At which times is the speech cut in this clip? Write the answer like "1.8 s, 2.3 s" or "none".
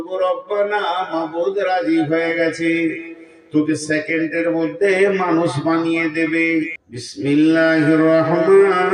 6.9 s